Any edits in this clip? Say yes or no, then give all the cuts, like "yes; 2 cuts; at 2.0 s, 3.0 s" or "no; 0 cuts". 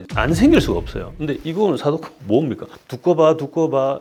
no; 0 cuts